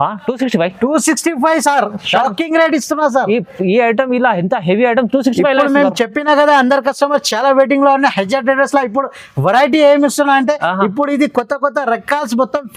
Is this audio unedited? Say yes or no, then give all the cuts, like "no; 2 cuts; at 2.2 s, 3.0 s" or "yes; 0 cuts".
yes; 0 cuts